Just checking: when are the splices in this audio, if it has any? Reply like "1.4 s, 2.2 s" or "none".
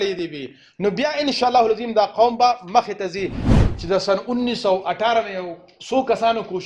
3.5 s